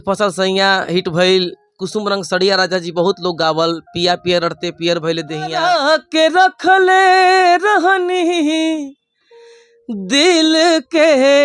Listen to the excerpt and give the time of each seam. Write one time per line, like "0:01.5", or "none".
0:05.6